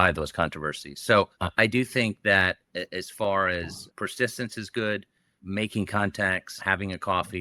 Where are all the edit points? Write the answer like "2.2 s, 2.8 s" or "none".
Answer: 1.4 s, 3.8 s, 5.4 s, 6.6 s